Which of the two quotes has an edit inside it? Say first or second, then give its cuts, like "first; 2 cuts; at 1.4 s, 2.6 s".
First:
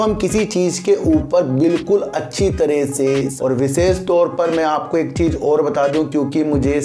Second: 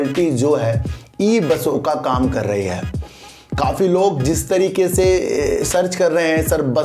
first; 1 cut; at 3.3 s